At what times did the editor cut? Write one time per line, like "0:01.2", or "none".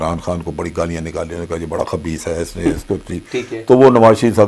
none